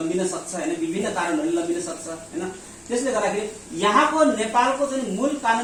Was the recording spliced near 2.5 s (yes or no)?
no